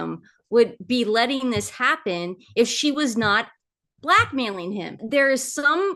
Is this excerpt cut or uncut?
cut